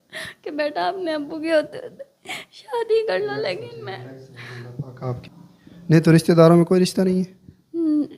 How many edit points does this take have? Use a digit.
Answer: 1